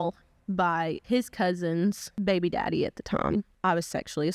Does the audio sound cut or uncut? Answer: cut